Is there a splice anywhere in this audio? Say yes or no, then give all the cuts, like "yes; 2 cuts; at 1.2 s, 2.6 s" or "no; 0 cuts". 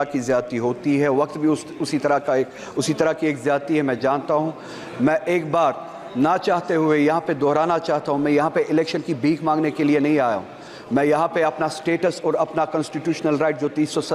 no; 0 cuts